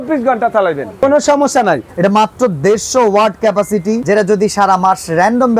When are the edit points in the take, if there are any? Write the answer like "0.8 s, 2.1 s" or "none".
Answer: 1.0 s, 1.9 s, 4.0 s